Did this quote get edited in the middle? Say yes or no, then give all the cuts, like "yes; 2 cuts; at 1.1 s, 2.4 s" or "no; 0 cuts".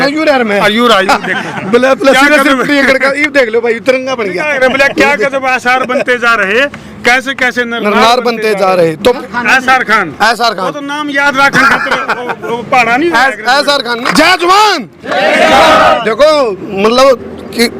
yes; 2 cuts; at 9.2 s, 14.0 s